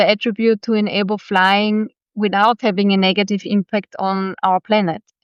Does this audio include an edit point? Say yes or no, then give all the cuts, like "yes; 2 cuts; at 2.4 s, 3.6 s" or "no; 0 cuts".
no; 0 cuts